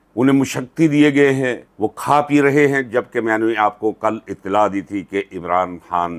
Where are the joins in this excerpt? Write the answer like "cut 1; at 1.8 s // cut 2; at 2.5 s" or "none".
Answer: none